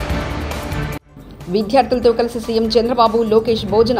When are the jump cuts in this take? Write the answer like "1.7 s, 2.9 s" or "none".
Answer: none